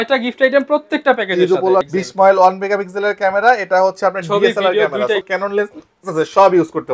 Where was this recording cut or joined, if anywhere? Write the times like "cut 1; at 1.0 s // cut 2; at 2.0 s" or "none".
cut 1; at 1.9 s // cut 2; at 5.2 s